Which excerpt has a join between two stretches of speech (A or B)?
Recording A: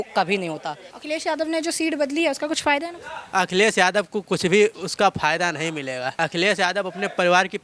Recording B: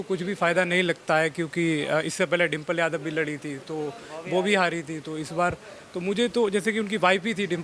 A